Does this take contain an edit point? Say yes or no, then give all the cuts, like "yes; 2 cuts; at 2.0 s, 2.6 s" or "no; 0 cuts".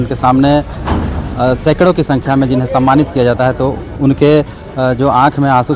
no; 0 cuts